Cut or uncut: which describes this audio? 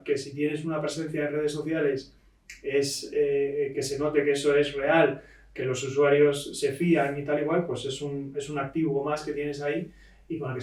uncut